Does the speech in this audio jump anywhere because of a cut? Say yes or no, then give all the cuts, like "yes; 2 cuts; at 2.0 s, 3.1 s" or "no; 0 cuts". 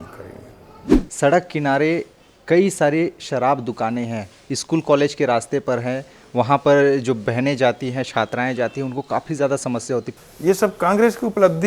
yes; 2 cuts; at 0.9 s, 10.2 s